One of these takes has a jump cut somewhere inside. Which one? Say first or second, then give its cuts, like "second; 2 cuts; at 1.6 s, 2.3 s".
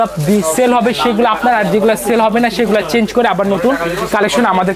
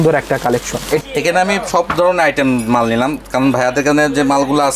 second; 1 cut; at 1.0 s